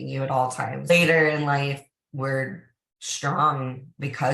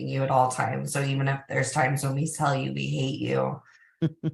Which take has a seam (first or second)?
first